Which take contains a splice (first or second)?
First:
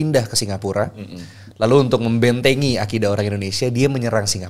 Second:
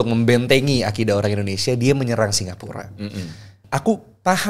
second